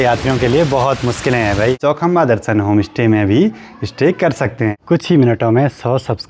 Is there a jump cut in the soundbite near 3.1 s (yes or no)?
no